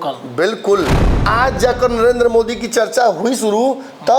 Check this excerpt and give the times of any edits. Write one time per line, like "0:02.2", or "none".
0:01.1